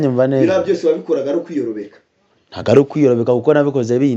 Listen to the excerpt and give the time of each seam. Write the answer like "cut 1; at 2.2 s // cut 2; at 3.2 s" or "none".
none